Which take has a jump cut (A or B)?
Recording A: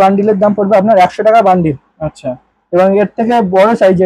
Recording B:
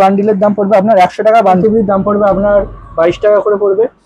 B